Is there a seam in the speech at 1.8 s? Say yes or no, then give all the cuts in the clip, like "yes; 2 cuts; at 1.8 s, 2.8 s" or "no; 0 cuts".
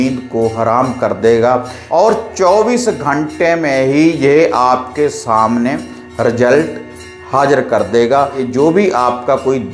yes; 2 cuts; at 1.8 s, 8.4 s